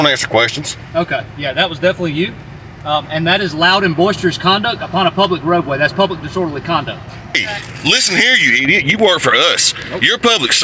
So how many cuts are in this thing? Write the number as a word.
one